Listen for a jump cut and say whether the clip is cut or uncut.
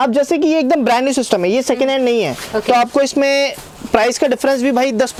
uncut